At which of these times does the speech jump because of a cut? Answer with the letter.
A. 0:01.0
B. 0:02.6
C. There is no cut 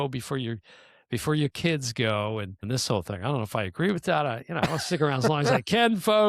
B